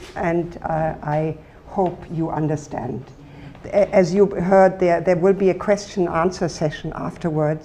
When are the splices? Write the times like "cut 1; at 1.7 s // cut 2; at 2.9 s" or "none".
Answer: cut 1; at 4.3 s